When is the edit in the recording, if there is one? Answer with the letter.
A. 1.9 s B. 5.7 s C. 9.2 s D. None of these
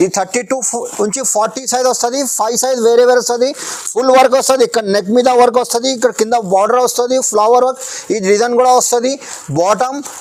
D